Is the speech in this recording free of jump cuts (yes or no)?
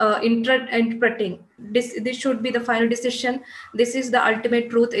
no